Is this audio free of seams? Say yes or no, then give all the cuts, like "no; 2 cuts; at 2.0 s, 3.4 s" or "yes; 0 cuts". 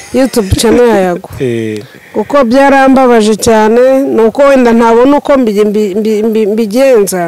yes; 0 cuts